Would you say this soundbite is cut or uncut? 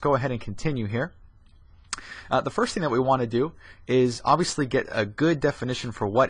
uncut